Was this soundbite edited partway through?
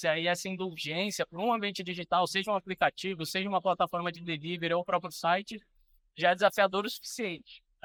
no; 0 cuts

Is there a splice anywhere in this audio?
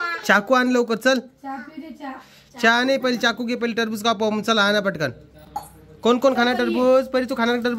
no; 0 cuts

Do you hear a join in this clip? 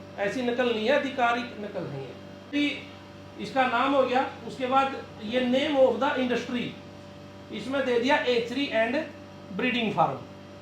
yes; 1 cut; at 2.5 s

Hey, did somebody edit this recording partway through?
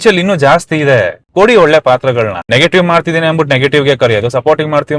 yes; 2 cuts; at 1.2 s, 2.4 s

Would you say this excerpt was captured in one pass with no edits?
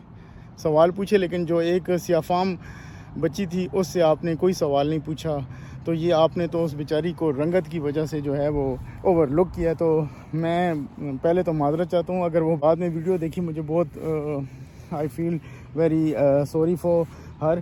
no; 1 cut; at 12.4 s

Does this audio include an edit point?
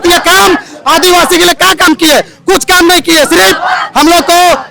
no; 0 cuts

